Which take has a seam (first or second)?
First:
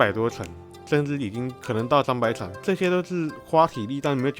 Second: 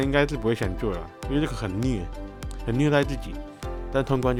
first